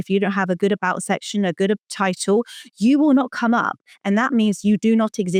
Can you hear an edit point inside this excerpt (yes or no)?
no